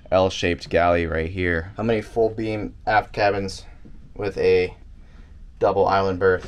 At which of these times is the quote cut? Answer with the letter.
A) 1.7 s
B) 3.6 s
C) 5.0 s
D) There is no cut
A